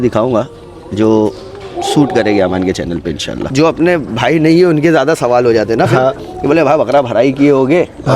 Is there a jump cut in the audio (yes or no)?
yes